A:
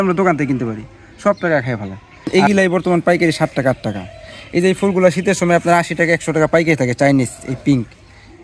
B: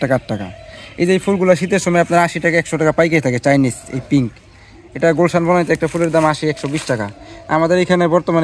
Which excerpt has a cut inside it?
A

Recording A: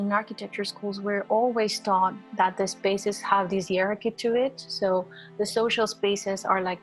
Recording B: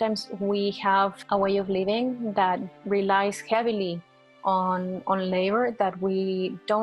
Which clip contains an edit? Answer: B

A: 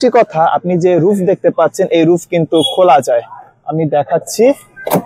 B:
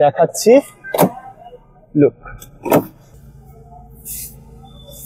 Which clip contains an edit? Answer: B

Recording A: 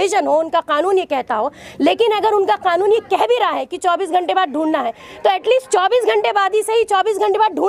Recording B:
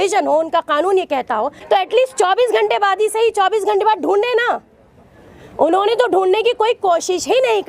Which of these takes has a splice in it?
B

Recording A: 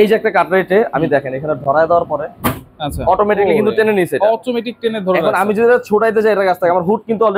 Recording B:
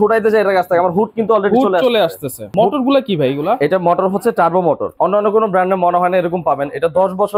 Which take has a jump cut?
B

